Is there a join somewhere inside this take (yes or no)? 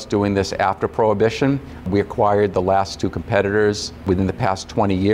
yes